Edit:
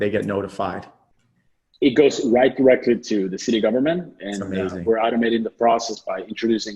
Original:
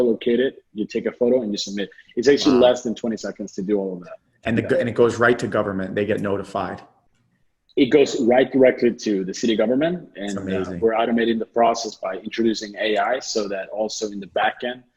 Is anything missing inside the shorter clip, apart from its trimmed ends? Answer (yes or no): no